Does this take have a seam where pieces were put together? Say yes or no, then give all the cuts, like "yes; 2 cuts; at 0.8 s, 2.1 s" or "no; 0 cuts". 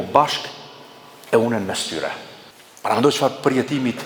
no; 0 cuts